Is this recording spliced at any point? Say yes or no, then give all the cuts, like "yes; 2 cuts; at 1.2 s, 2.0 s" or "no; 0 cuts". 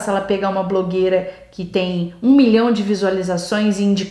no; 0 cuts